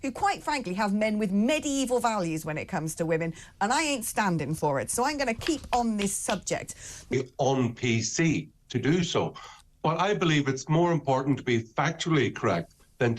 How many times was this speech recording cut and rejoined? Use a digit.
1